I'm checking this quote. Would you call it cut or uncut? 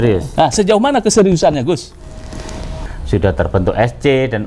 cut